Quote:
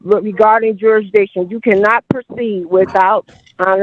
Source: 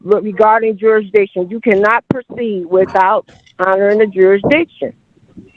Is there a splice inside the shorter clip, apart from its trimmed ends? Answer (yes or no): no